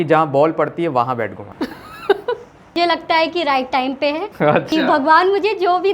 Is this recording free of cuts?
no; 1 cut; at 2.7 s

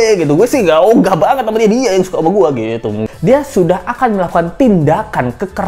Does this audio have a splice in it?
yes; 1 cut; at 3.1 s

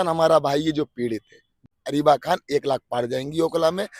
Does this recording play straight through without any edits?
no; 1 cut; at 1.7 s

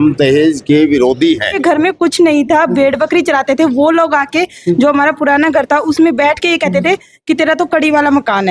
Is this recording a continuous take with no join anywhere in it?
no; 1 cut; at 1.5 s

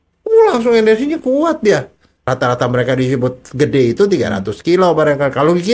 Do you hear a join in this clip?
yes; 1 cut; at 2.3 s

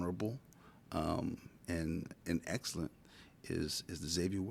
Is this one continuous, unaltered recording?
yes; 0 cuts

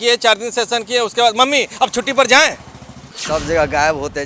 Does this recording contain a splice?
yes; 1 cut; at 3.2 s

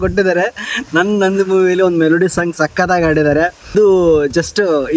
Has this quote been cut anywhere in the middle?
yes; 1 cut; at 3.7 s

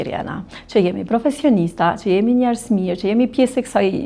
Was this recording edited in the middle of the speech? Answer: no; 0 cuts

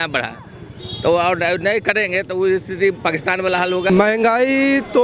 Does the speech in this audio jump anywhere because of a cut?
yes; 1 cut; at 3.9 s

